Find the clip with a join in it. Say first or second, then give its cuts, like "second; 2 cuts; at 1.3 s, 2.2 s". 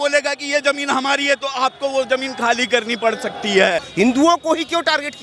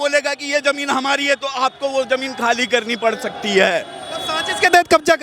first; 1 cut; at 3.9 s